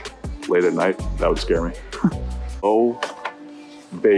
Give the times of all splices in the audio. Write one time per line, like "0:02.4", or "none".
0:02.6